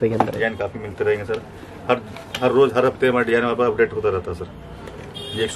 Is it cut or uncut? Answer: uncut